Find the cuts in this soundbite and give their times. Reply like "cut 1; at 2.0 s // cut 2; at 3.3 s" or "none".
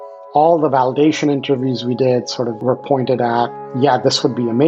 cut 1; at 2.6 s